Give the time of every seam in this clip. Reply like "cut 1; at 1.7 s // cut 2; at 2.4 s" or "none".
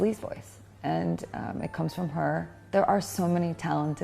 cut 1; at 2.6 s